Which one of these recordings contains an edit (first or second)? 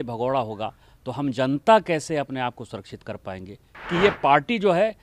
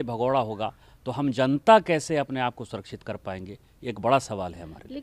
first